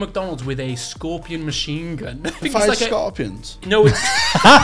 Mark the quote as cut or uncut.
cut